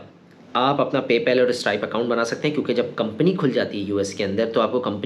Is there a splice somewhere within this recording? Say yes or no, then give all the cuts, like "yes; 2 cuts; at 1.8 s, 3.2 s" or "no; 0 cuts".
no; 0 cuts